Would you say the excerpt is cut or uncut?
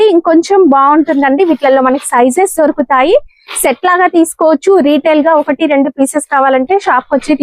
uncut